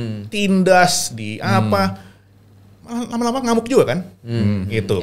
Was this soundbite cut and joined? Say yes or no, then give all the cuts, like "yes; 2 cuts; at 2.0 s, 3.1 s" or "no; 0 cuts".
no; 0 cuts